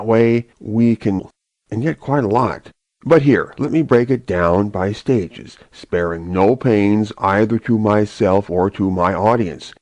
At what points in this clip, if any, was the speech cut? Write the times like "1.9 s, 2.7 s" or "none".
none